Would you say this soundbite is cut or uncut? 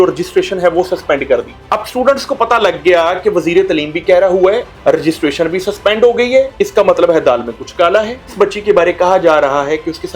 cut